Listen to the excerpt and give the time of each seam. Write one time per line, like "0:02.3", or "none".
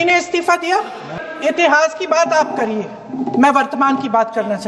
0:01.1